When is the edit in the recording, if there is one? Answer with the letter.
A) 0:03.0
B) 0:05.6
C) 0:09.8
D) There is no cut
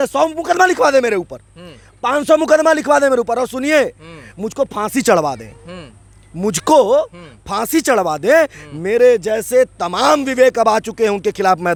D